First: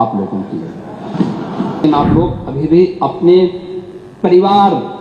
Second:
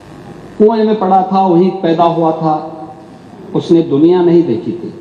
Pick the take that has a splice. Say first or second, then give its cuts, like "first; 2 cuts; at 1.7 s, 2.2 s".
first; 1 cut; at 1.8 s